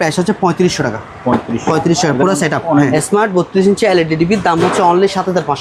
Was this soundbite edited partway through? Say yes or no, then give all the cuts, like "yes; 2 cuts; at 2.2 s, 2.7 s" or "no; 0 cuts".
yes; 1 cut; at 2.9 s